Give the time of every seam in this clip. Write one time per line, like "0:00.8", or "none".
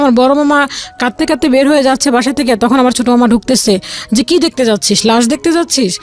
none